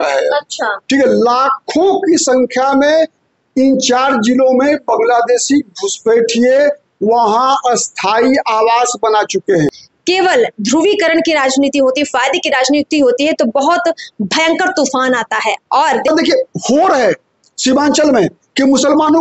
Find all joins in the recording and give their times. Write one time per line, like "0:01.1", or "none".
0:09.9
0:16.1